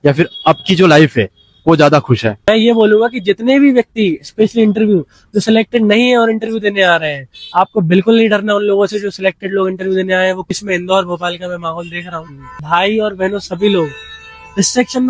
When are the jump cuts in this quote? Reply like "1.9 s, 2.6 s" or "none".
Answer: 2.3 s, 10.6 s, 12.5 s